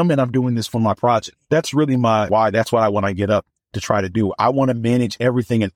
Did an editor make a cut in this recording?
yes; 1 cut; at 1.4 s

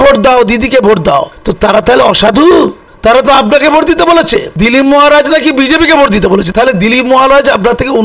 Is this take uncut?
no; 4 cuts; at 1.4 s, 2.9 s, 4.5 s, 6.5 s

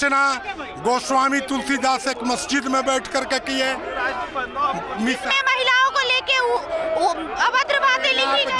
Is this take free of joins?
yes; 0 cuts

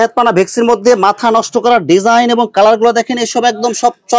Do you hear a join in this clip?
no; 0 cuts

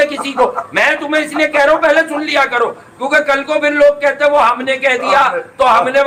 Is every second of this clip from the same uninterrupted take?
yes; 0 cuts

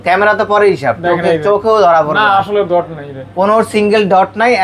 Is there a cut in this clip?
no; 0 cuts

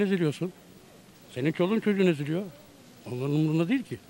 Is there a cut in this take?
no; 0 cuts

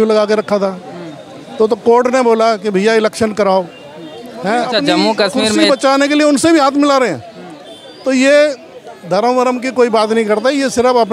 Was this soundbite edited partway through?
yes; 1 cut; at 5.6 s

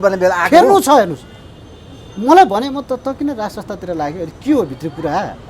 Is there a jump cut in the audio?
no; 0 cuts

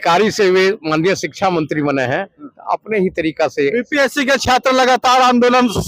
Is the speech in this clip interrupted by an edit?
no; 0 cuts

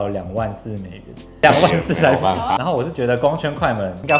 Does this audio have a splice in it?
yes; 2 cuts; at 1.4 s, 2.6 s

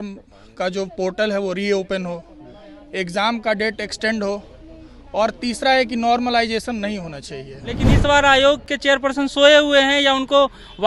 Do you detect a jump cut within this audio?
yes; 1 cut; at 7.9 s

